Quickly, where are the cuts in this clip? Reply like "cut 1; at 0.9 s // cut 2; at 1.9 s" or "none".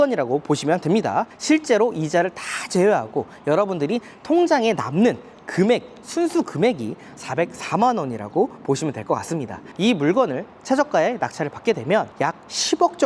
cut 1; at 1.3 s // cut 2; at 9.7 s

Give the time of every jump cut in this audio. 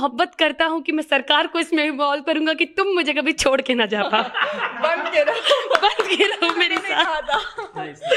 none

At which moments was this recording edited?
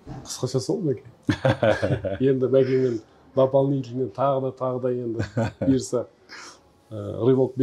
none

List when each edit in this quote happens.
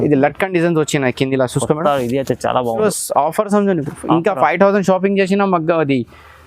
cut 1; at 1.9 s // cut 2; at 2.8 s

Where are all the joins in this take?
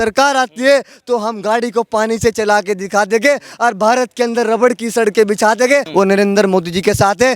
cut 1; at 5.9 s

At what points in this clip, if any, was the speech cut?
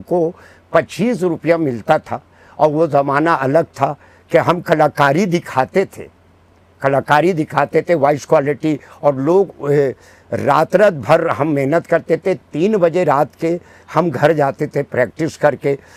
none

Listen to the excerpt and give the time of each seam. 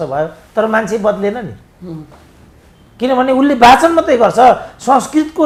none

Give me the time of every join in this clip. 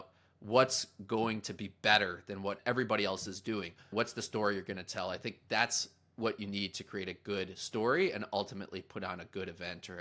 cut 1; at 2.6 s // cut 2; at 3.9 s

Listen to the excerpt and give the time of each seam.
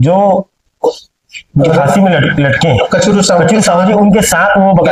none

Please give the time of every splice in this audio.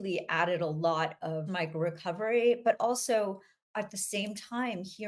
none

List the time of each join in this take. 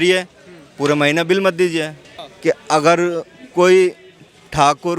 cut 1; at 2.2 s

